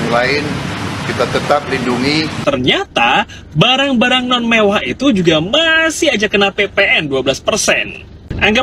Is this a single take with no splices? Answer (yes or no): no